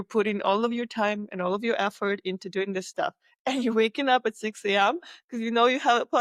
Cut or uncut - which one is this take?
uncut